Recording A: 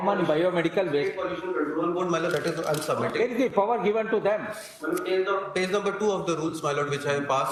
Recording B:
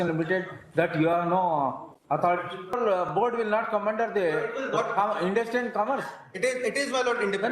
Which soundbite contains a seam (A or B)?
B